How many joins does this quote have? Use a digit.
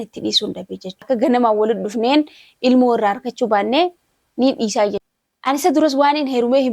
1